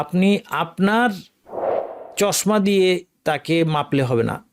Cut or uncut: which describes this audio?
uncut